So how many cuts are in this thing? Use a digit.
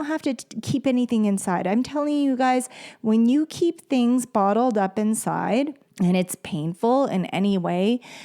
1